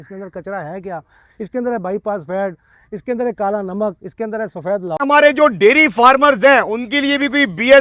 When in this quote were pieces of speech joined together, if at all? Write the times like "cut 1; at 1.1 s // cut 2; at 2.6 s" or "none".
cut 1; at 5.0 s